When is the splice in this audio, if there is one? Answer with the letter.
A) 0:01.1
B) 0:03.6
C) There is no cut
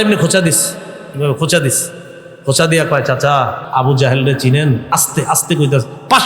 B